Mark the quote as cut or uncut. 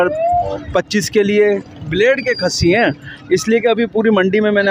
uncut